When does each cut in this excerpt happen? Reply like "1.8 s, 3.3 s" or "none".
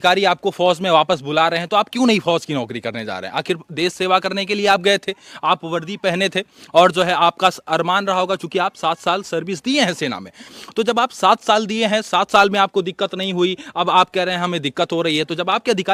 none